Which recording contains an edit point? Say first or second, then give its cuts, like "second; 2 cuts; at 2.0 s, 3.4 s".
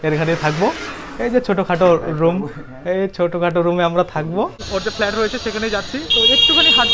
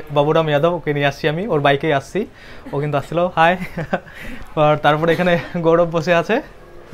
first; 1 cut; at 4.6 s